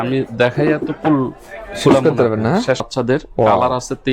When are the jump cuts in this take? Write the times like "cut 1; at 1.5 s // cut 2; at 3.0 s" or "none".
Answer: cut 1; at 2.9 s